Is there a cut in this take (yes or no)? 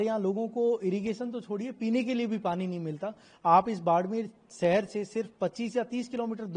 no